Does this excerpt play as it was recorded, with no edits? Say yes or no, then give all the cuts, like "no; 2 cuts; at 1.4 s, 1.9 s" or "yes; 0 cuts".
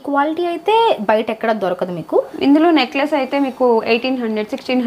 no; 1 cut; at 2.3 s